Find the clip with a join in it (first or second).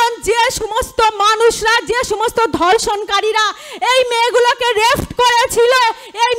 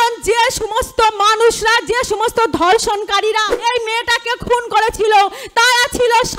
second